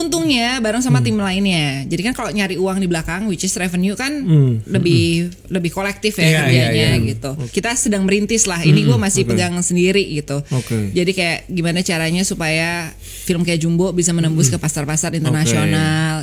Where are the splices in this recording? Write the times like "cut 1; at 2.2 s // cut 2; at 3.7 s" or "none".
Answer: cut 1; at 7.4 s